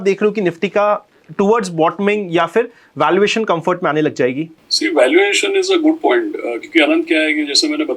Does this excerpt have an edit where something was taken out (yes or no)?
no